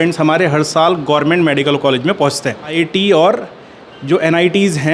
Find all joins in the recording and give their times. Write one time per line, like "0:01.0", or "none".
0:02.7